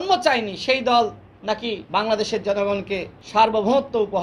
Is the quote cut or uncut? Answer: cut